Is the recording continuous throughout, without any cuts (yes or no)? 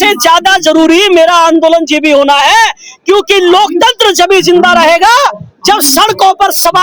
yes